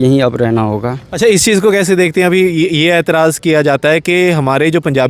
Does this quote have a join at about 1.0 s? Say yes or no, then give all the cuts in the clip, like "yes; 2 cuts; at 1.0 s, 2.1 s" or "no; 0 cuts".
yes; 1 cut; at 1.0 s